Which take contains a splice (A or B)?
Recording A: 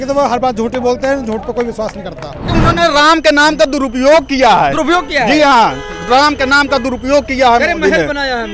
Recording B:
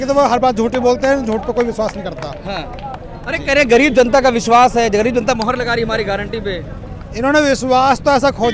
A